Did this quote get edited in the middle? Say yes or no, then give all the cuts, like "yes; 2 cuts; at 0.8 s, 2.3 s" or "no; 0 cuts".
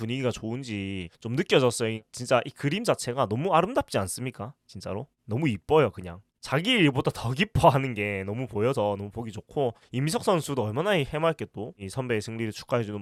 no; 0 cuts